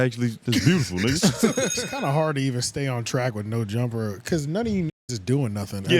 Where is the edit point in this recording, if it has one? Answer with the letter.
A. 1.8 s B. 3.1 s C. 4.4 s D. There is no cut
A